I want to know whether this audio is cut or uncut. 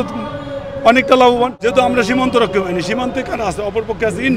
cut